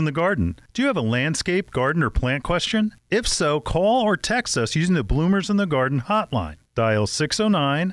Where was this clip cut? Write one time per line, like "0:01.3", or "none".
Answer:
none